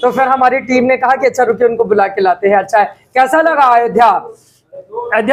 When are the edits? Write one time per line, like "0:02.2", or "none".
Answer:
none

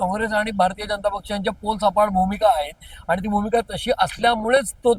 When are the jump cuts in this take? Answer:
none

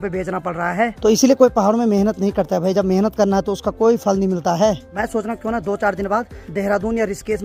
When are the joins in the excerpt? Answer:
none

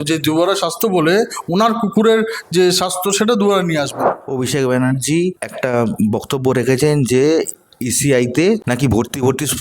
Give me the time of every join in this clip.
0:04.2
0:08.6

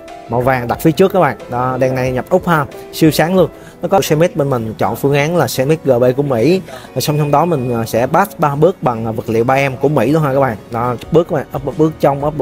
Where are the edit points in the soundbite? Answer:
0:04.0
0:11.0

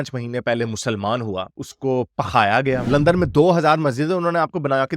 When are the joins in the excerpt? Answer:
0:02.9

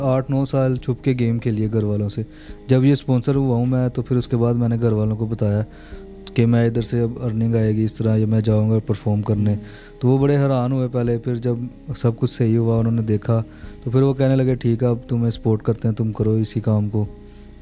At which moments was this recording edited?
none

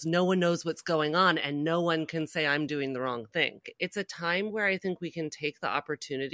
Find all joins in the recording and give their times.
0:03.7

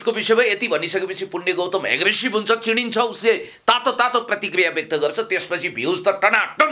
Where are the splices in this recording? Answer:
none

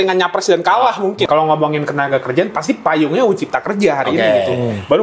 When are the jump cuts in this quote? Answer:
0:01.2

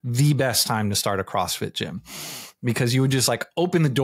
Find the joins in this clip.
none

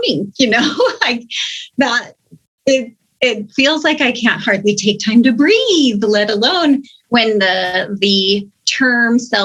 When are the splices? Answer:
none

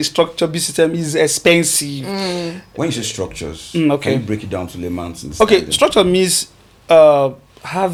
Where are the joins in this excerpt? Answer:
none

